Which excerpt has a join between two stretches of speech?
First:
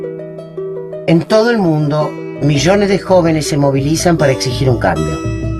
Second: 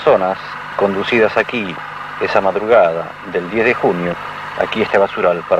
first; 1 cut; at 1.0 s

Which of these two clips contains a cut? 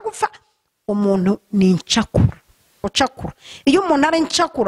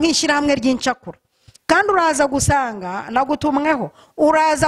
first; 1 cut; at 2.8 s

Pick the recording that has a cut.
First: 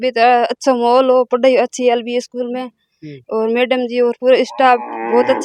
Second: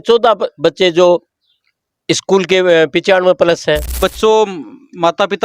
second; 1 cut; at 3.9 s

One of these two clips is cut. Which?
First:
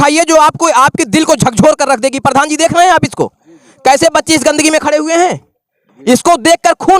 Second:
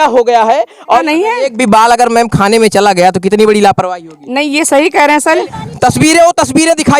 second; 2 cuts; at 1.0 s, 5.4 s

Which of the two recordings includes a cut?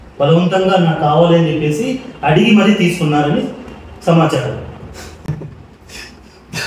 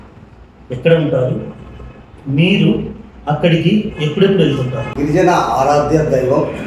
second; 1 cut; at 4.9 s

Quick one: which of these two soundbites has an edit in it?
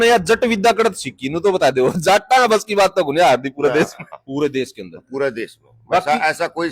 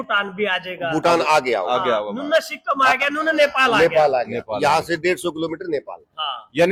first; 1 cut; at 4.1 s

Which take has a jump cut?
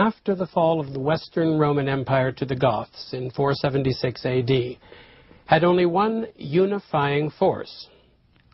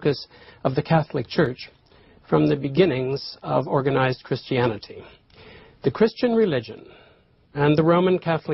second; 1 cut; at 1.3 s

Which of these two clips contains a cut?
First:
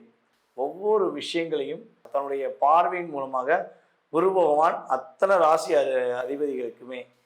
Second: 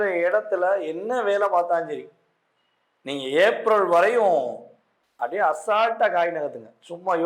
first; 1 cut; at 2.1 s

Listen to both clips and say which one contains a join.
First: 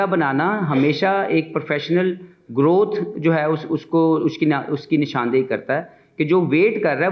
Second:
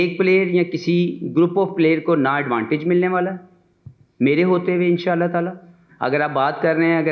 second; 1 cut; at 5.8 s

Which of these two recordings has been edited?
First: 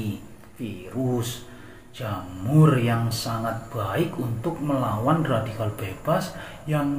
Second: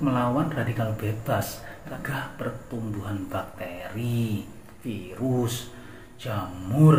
second; 1 cut; at 1.9 s

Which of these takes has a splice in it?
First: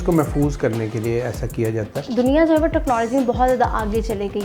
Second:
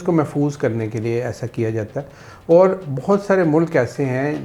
first; 1 cut; at 2.1 s

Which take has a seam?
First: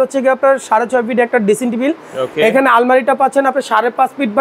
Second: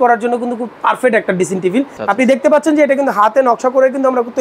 second; 1 cut; at 2.0 s

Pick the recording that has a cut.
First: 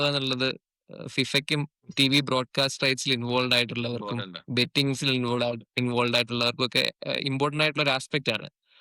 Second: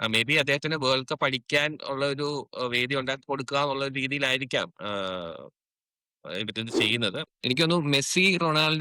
second; 1 cut; at 7.3 s

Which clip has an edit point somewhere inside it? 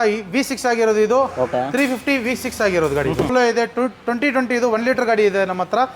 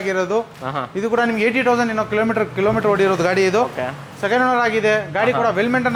first; 1 cut; at 3.3 s

